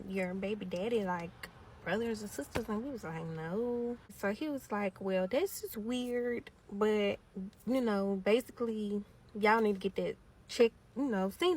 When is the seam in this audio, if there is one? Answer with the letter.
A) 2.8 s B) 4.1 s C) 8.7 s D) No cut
B